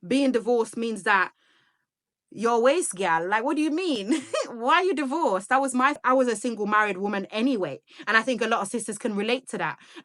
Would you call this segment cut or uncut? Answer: cut